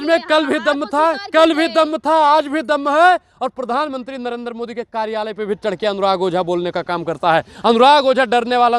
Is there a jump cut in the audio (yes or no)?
no